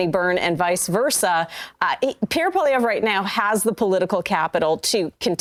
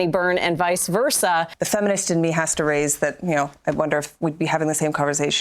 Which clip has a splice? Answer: second; 1 cut; at 1.5 s

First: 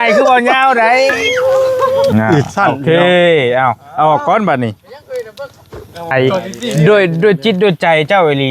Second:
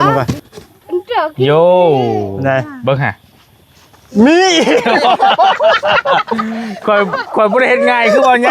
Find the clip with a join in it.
first; 2 cuts; at 2.1 s, 6.1 s

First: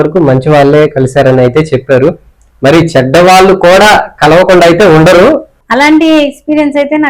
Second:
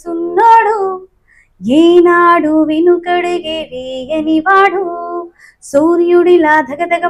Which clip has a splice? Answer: first; 1 cut; at 5.5 s

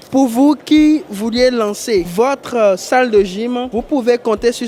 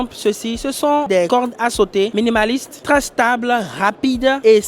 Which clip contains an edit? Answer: second; 2 cuts; at 1.2 s, 2.8 s

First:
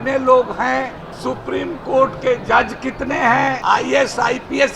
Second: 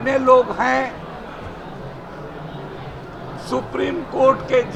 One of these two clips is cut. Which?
first; 2 cuts; at 1.0 s, 3.6 s

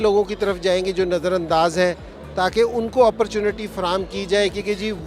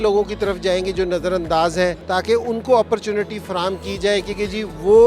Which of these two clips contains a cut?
second; 1 cut; at 2.0 s

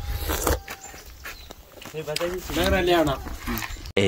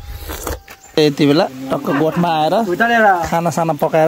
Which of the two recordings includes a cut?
second; 1 cut; at 1.0 s

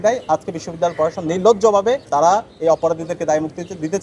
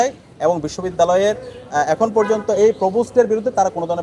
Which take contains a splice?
first; 1 cut; at 2.0 s

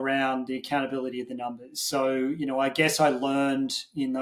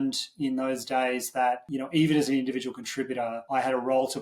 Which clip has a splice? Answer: second; 2 cuts; at 1.7 s, 3.4 s

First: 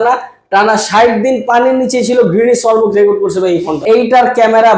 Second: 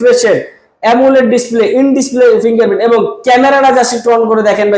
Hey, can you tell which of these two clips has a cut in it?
first; 1 cut; at 3.7 s

